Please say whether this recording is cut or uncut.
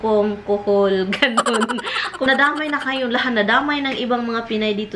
cut